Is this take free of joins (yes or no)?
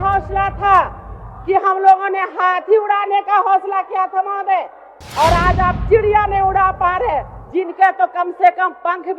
yes